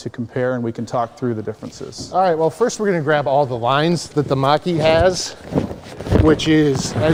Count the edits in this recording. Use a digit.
0